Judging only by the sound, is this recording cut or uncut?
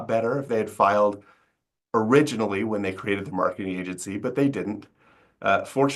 uncut